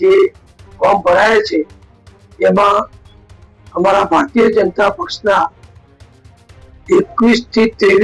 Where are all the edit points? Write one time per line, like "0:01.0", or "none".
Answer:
none